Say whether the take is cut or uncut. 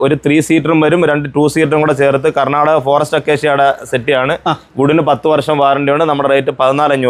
uncut